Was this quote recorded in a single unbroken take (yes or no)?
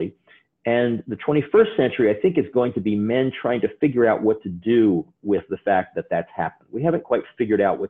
yes